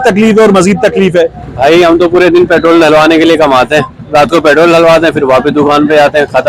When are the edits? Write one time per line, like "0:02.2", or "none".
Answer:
0:01.4